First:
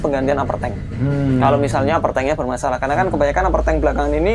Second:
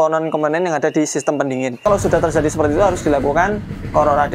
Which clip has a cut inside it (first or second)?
second